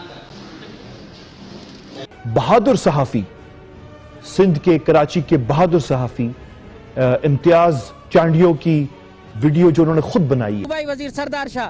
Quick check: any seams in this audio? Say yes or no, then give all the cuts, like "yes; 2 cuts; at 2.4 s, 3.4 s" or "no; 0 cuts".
yes; 2 cuts; at 2.1 s, 10.7 s